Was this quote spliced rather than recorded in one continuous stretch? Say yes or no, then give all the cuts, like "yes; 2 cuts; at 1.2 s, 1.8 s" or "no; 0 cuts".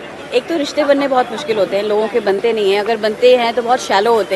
no; 0 cuts